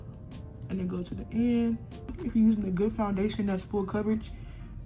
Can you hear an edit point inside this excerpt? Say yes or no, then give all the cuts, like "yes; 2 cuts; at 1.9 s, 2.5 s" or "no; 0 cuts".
yes; 1 cut; at 2.2 s